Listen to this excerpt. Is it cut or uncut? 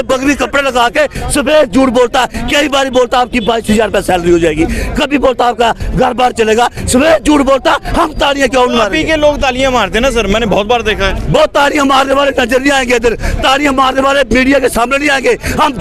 uncut